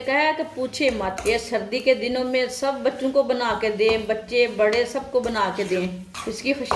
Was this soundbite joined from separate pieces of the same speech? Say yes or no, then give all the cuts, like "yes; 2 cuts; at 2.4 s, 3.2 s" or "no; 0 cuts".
yes; 1 cut; at 1.2 s